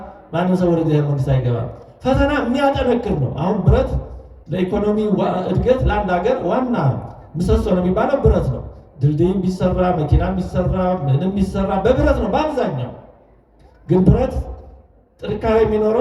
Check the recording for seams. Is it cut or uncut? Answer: uncut